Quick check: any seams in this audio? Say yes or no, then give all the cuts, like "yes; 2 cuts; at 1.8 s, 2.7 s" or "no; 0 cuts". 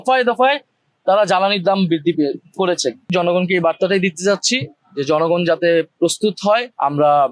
yes; 1 cut; at 3.1 s